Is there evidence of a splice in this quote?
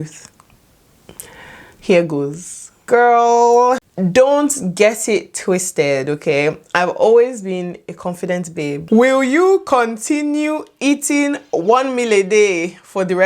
yes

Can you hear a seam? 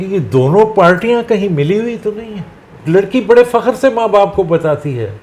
yes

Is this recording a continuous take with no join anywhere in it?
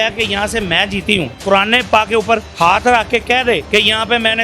no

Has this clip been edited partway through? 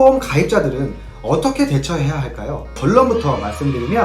yes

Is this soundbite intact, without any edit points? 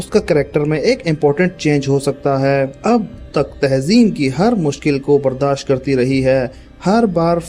no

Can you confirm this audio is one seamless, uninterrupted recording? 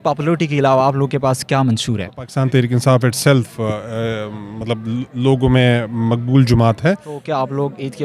no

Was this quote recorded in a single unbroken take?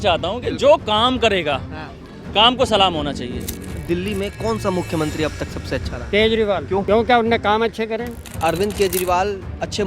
no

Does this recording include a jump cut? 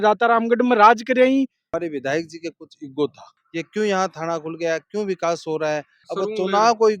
yes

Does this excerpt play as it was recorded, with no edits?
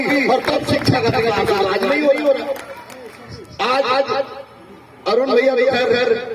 yes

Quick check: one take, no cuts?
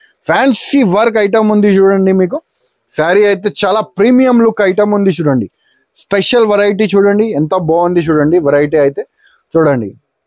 yes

